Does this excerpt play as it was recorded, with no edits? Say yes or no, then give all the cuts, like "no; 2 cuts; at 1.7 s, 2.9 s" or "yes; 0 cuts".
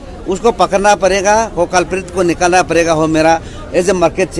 yes; 0 cuts